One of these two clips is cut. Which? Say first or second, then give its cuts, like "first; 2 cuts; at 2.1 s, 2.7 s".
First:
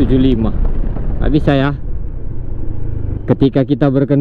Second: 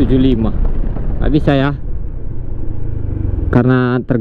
first; 1 cut; at 3.2 s